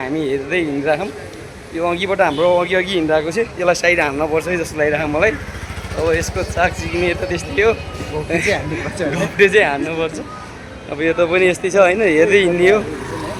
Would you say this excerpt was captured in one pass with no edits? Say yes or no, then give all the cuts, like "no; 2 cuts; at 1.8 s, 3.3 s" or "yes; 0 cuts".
yes; 0 cuts